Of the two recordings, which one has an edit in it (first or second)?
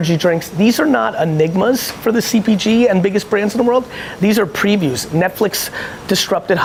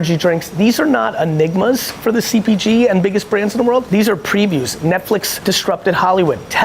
second